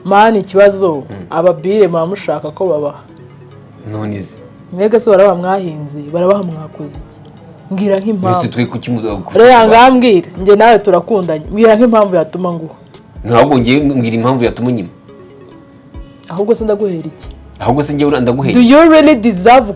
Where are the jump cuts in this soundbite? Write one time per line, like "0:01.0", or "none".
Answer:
none